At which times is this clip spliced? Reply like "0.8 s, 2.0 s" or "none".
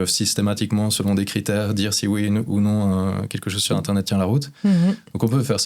none